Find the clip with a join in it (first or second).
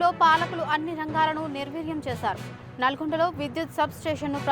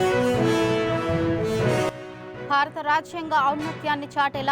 second